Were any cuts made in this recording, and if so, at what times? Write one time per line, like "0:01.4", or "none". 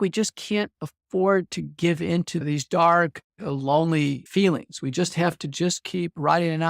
0:02.4
0:04.2